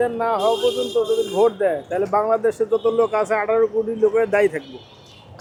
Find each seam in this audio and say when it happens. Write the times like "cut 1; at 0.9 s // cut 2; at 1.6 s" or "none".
none